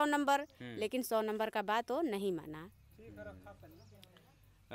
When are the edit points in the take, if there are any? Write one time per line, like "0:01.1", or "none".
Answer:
none